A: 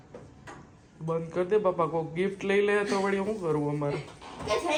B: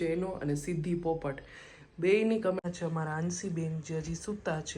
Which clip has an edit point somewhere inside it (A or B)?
B